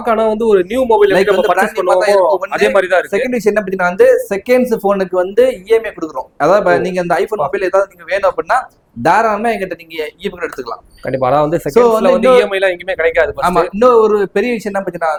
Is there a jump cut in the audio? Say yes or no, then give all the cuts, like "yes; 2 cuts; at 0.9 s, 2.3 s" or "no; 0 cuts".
no; 0 cuts